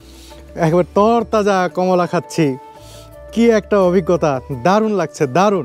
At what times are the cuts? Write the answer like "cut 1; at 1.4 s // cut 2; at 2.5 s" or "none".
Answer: none

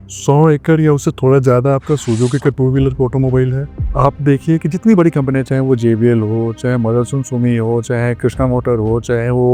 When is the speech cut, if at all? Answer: none

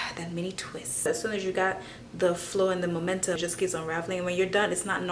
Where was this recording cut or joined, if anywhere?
cut 1; at 1.1 s // cut 2; at 3.4 s

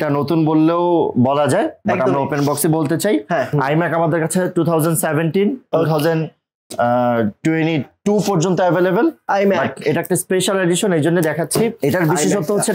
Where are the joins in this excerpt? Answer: cut 1; at 3.5 s // cut 2; at 11.8 s

